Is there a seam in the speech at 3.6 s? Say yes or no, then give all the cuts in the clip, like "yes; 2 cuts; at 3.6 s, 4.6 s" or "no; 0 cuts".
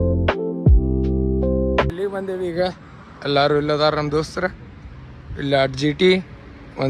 no; 1 cut; at 1.9 s